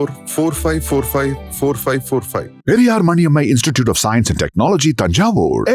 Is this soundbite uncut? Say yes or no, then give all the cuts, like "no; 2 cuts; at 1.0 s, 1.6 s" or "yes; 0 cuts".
yes; 0 cuts